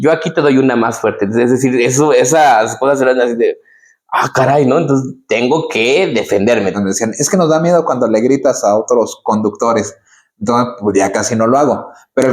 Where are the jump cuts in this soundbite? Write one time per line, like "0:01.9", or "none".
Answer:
0:06.8